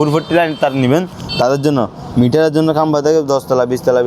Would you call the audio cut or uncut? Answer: uncut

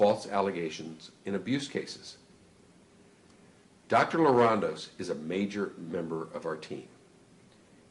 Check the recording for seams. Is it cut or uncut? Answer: uncut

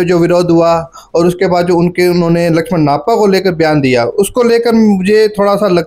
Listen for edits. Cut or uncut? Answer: uncut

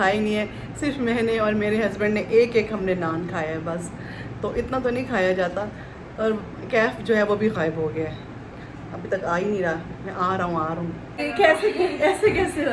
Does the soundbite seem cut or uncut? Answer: uncut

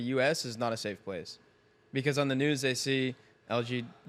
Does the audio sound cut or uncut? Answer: uncut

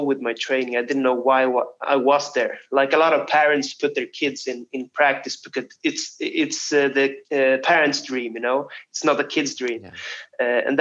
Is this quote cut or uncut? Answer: uncut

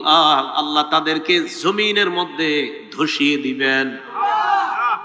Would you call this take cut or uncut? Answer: cut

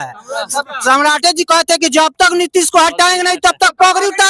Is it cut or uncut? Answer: uncut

